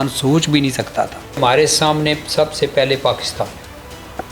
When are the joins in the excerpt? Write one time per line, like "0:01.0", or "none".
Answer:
0:01.4